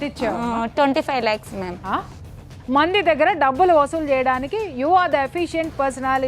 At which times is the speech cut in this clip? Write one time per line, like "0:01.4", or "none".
0:02.2